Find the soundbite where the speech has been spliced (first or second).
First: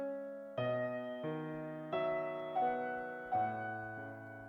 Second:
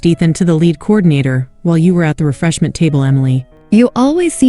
second